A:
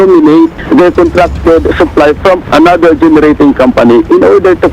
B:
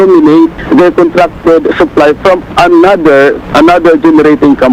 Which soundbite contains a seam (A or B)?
A